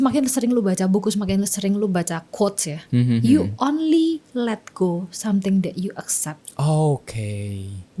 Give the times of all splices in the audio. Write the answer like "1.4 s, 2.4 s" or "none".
none